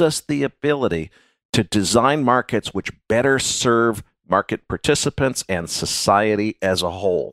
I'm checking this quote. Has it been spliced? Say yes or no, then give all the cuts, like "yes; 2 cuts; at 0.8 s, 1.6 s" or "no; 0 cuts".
no; 0 cuts